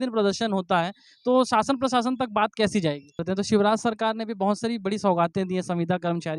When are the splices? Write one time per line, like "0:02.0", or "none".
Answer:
0:03.2

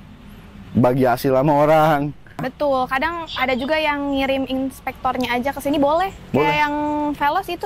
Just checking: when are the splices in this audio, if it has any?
0:02.5

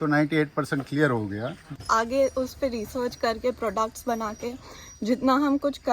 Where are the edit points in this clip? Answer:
0:01.7

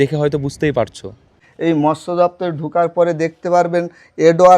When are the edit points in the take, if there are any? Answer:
0:01.4

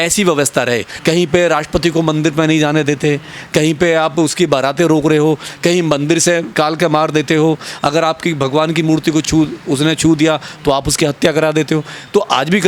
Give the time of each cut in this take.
0:00.9
0:06.5

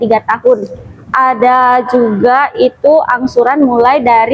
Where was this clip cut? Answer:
0:01.1

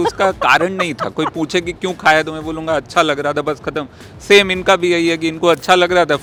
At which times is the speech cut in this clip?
none

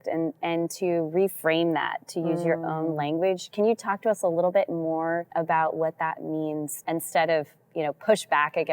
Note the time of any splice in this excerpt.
0:05.3
0:06.7

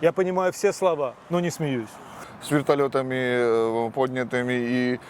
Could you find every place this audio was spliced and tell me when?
0:02.2

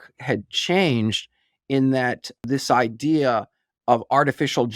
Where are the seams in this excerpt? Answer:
0:02.4

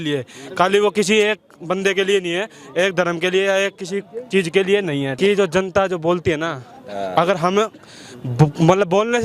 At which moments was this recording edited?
none

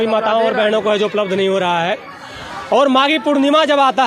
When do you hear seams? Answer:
none

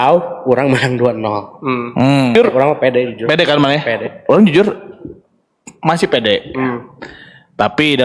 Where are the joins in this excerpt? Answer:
0:02.3

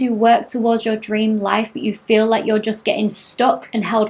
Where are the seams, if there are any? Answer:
none

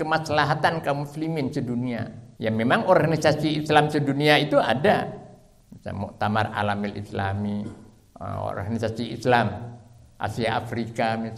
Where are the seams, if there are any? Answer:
0:02.2

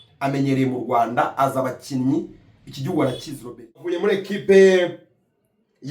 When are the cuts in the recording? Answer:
0:03.9

